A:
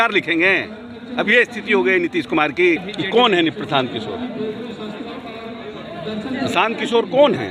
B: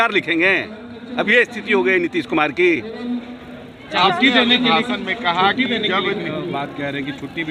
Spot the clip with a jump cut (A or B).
A